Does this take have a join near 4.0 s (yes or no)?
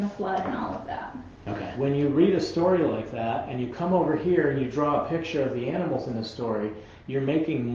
no